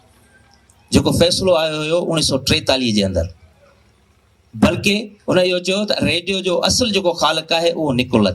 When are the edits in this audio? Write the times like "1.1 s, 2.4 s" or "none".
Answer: none